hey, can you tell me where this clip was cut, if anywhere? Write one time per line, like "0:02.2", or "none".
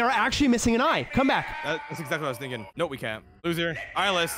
0:03.3